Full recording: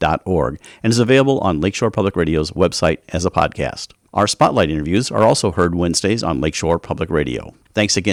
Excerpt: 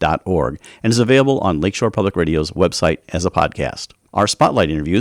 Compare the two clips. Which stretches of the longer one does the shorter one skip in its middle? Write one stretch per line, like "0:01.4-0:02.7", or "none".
none